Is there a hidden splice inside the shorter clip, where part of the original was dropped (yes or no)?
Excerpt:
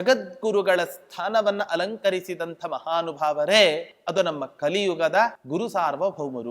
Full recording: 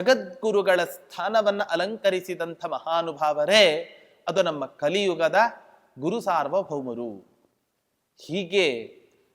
yes